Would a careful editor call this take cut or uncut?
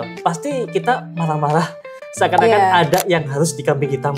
uncut